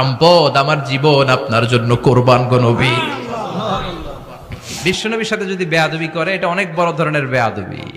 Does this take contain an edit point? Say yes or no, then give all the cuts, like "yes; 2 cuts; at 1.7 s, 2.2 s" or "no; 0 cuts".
yes; 1 cut; at 4.7 s